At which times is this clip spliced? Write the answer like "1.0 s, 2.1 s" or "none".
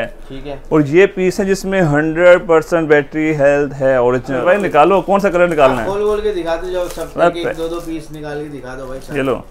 4.4 s